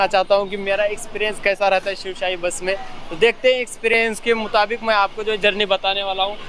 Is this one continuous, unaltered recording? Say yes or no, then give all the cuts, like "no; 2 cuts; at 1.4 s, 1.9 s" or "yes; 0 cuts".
yes; 0 cuts